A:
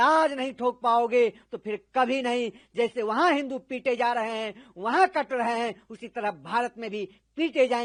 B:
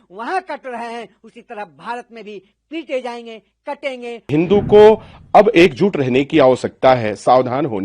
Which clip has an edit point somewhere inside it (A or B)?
B